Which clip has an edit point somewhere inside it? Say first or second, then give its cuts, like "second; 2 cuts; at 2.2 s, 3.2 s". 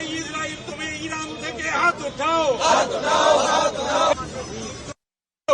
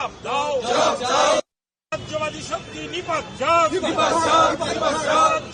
first; 1 cut; at 4.1 s